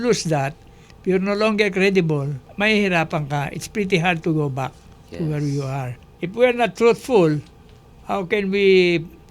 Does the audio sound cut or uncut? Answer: cut